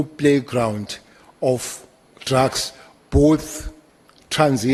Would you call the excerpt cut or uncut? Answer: uncut